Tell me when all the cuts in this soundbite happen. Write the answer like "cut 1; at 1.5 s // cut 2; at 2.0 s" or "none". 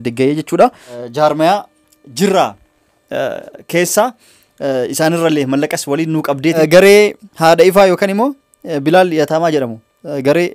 cut 1; at 1.0 s // cut 2; at 6.6 s